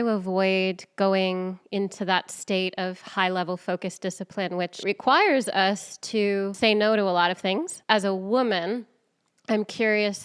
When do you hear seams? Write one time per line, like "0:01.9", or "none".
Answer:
0:04.8
0:06.5
0:07.7